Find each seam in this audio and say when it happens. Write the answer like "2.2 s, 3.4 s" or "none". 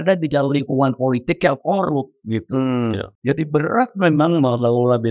3.1 s